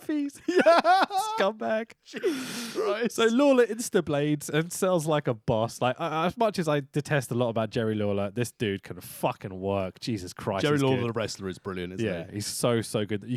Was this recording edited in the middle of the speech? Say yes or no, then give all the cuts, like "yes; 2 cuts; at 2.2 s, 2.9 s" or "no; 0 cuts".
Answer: no; 0 cuts